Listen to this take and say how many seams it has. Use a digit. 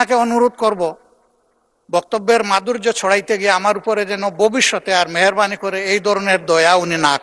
0